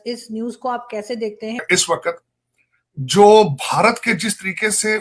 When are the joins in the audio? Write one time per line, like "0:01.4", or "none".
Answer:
0:01.6